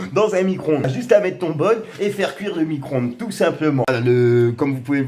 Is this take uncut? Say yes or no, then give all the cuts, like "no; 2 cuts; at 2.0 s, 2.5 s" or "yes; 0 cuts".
no; 2 cuts; at 1.0 s, 3.8 s